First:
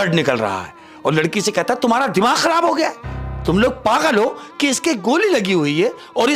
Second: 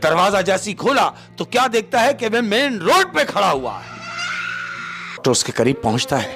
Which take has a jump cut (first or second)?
second